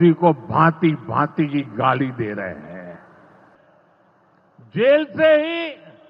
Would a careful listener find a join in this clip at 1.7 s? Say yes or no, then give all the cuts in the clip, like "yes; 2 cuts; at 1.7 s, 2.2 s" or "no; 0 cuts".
no; 1 cut; at 3.6 s